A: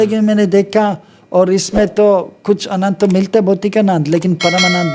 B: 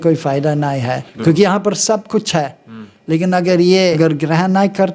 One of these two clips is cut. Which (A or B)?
B